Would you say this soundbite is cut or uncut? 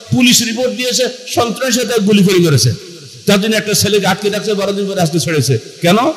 uncut